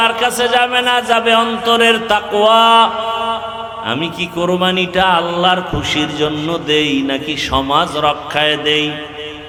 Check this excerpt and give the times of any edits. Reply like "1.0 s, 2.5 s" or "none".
none